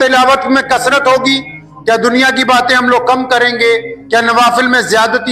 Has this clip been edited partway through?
no; 0 cuts

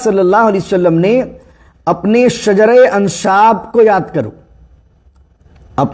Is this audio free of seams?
yes; 0 cuts

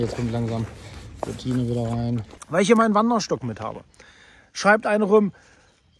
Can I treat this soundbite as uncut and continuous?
no; 1 cut; at 2.3 s

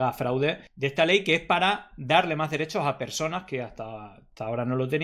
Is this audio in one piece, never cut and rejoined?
yes; 0 cuts

